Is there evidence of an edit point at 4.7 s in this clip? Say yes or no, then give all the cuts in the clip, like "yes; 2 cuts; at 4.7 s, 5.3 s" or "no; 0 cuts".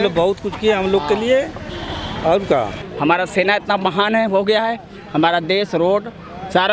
no; 1 cut; at 2.8 s